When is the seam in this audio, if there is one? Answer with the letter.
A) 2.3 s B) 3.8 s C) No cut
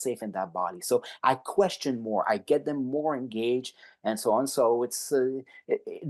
C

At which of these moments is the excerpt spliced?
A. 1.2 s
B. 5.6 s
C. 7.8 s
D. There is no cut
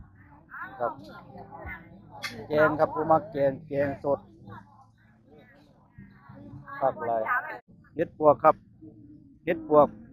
C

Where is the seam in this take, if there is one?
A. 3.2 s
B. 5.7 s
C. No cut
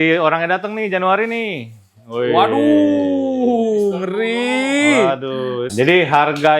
B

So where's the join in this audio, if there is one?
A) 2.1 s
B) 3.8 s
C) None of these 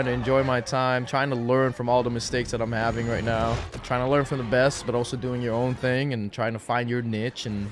B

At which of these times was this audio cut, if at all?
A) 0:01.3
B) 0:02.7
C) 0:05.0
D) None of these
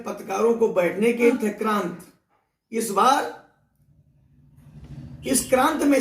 A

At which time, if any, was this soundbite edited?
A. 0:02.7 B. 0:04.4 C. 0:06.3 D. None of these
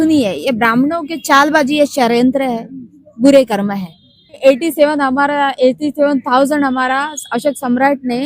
B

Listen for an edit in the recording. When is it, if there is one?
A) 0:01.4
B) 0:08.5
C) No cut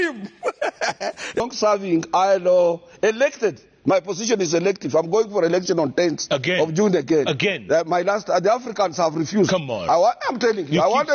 A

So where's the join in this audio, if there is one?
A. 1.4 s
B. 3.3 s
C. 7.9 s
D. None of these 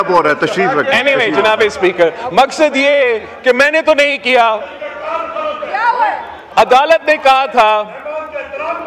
D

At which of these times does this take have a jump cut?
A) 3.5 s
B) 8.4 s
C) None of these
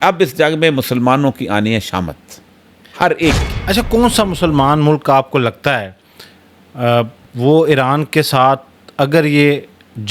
A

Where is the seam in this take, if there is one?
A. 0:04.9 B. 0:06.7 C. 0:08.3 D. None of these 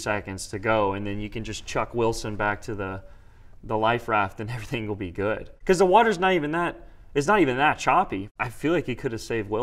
C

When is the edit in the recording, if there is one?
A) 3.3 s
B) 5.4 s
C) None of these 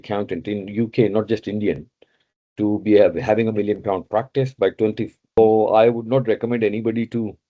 B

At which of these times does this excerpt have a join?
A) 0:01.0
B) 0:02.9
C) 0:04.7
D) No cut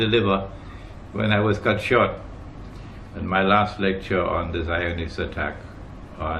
D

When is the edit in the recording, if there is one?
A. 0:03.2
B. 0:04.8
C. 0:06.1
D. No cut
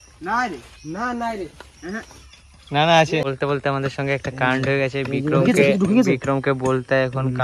A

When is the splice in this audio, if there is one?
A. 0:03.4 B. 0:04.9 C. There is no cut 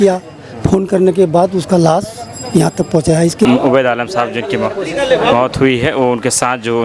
A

